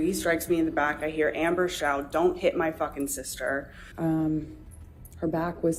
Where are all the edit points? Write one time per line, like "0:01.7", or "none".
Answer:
none

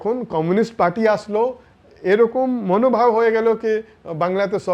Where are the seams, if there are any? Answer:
none

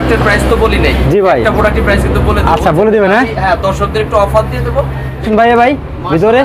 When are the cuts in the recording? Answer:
0:05.2

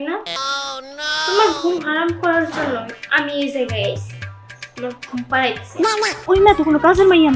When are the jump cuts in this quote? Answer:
0:06.2

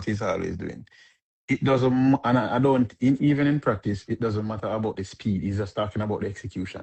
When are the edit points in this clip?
none

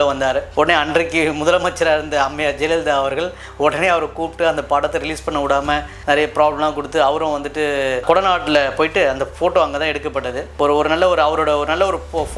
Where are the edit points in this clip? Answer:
none

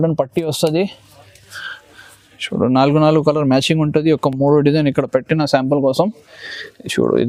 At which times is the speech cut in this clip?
none

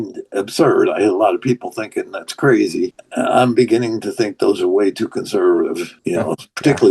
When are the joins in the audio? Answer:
0:03.0
0:05.9

